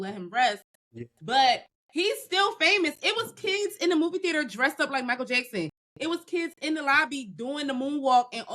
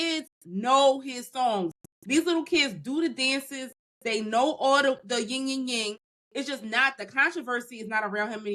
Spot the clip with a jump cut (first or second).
first